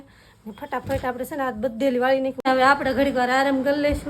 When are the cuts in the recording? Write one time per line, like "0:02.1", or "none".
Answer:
0:02.4

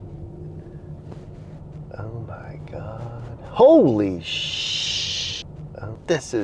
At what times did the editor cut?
0:05.4

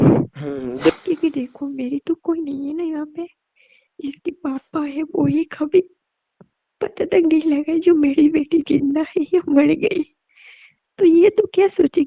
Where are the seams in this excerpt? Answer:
0:00.9

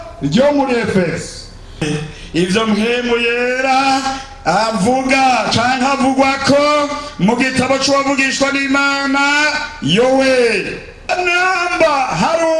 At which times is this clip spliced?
0:01.8
0:11.1

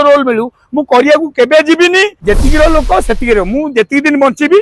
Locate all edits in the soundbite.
0:02.1

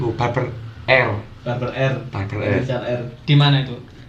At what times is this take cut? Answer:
none

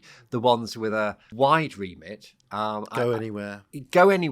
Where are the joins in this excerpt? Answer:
0:01.3

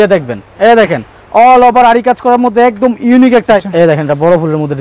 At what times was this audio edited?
0:03.7

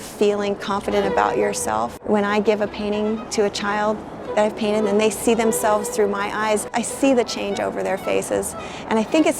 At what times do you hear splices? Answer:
0:02.0
0:06.7

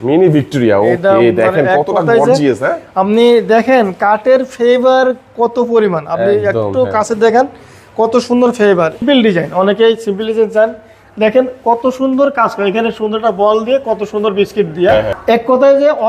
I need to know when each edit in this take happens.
0:09.0
0:15.1

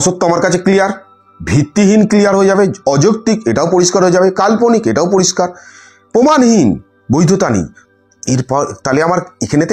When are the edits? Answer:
none

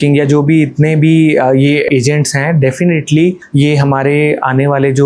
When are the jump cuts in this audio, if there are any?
0:01.9
0:03.4

